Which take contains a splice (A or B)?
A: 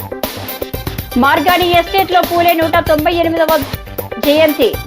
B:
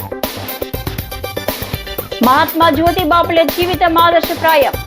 B